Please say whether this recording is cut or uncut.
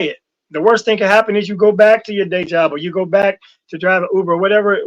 uncut